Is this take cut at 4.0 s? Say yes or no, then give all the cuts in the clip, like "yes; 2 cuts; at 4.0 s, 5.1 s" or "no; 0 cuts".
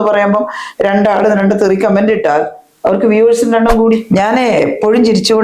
yes; 1 cut; at 4.0 s